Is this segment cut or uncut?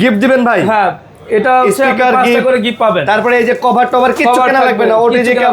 uncut